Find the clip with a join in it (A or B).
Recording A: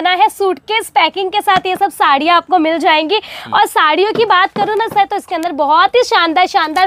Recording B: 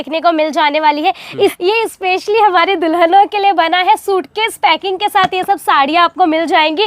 B